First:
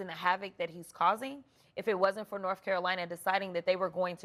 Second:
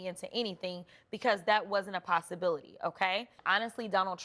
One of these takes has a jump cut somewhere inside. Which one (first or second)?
second